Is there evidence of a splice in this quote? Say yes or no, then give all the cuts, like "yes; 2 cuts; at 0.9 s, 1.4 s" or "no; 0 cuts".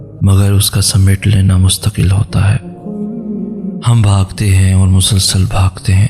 yes; 2 cuts; at 2.8 s, 3.8 s